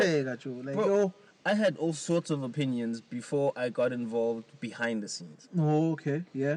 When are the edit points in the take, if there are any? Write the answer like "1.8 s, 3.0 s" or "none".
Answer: none

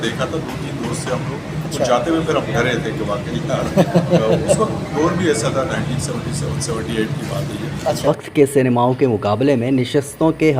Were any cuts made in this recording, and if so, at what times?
8.0 s

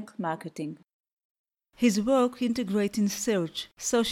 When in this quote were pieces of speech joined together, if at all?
0.9 s

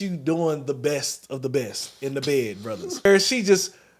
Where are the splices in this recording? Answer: 3.1 s

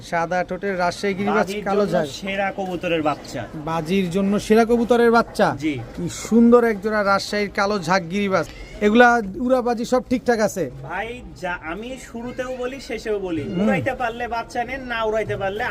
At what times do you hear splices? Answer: none

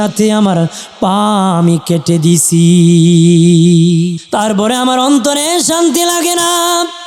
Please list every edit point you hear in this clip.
4.2 s

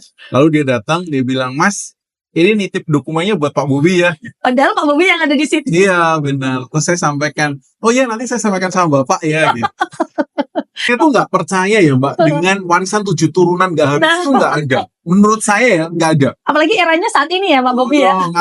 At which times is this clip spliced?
10.9 s

